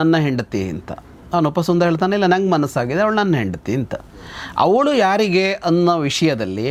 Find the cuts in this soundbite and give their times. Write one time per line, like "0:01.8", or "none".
none